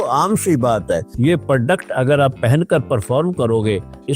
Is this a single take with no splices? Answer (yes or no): no